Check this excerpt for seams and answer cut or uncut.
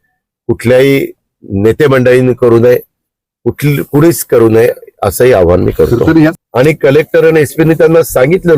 cut